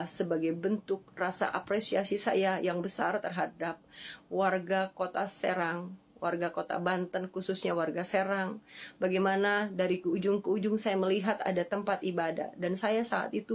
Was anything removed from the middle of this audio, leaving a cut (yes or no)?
no